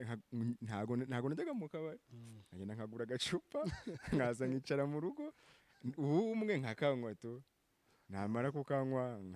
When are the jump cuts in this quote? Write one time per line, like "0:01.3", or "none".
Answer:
none